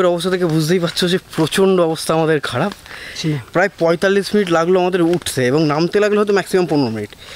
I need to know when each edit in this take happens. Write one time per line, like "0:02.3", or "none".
0:03.2